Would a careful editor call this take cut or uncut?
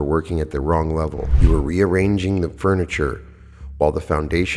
cut